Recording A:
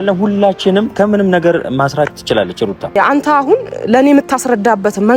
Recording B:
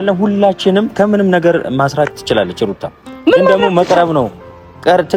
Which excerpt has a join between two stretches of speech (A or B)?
A